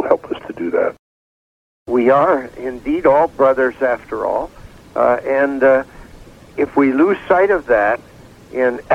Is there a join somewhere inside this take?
yes; 1 cut; at 1.5 s

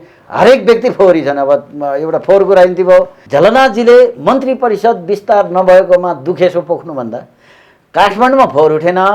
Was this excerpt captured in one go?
no; 1 cut; at 3.2 s

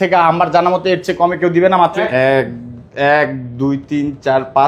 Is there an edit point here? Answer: yes; 1 cut; at 2.0 s

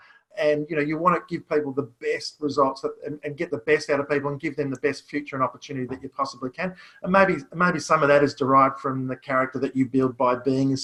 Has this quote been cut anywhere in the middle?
no; 0 cuts

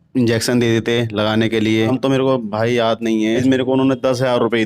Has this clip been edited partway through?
yes; 2 cuts; at 1.9 s, 3.4 s

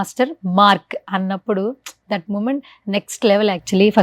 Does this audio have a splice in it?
yes; 1 cut; at 0.9 s

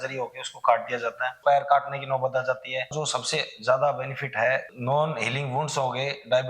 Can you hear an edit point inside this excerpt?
yes; 2 cuts; at 1.3 s, 3.0 s

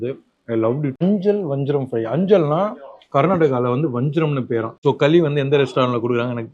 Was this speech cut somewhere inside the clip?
yes; 2 cuts; at 1.0 s, 4.8 s

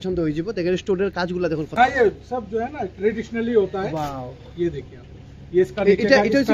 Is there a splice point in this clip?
no; 0 cuts

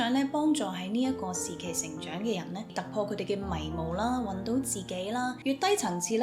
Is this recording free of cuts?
no; 2 cuts; at 2.7 s, 5.4 s

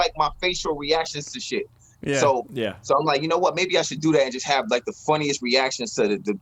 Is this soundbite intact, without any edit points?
yes; 0 cuts

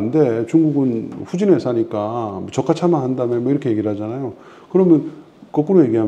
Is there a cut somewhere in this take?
no; 0 cuts

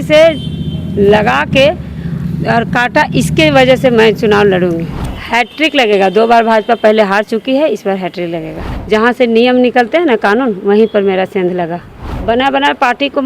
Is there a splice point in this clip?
yes; 3 cuts; at 4.9 s, 8.6 s, 12.1 s

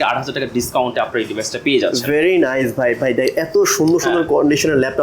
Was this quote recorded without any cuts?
yes; 0 cuts

